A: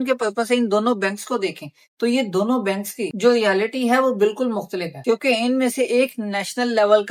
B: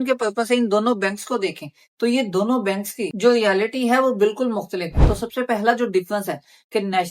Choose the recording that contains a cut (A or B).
B